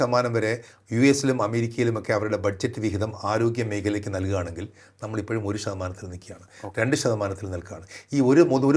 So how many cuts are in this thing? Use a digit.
0